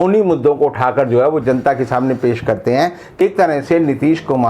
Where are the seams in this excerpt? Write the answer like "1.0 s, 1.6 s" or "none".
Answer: 3.2 s